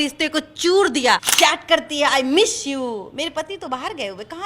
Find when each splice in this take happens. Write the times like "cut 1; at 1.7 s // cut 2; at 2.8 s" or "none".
cut 1; at 1.3 s